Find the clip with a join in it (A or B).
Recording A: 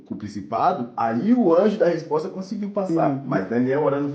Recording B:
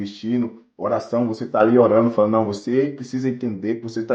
A